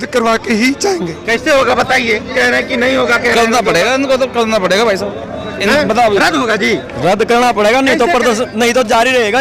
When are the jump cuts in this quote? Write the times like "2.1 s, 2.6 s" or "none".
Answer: none